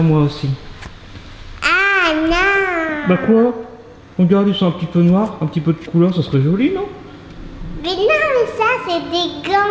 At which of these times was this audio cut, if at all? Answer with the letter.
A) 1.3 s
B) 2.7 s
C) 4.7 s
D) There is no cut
D